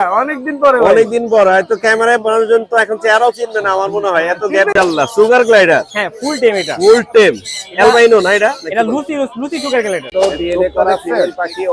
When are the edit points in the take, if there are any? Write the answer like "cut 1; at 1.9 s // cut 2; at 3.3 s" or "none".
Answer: cut 1; at 4.7 s // cut 2; at 10.1 s